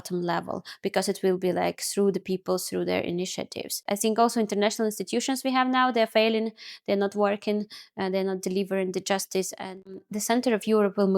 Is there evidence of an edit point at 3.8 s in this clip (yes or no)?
yes